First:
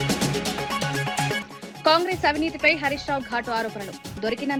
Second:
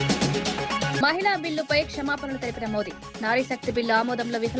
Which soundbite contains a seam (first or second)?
second